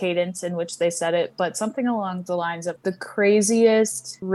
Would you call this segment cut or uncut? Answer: uncut